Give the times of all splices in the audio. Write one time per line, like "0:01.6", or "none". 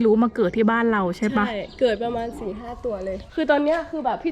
0:03.2